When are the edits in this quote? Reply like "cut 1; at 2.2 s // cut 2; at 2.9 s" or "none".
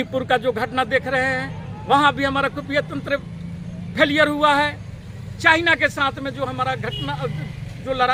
none